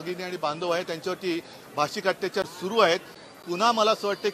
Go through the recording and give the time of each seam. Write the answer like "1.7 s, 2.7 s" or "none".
3.2 s